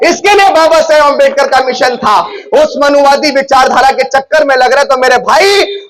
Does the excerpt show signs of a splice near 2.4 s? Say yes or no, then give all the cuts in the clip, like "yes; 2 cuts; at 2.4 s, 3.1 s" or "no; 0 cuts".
yes; 1 cut; at 2.4 s